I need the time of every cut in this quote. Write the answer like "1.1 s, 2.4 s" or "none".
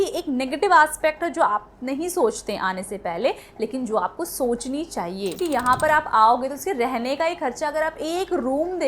5.4 s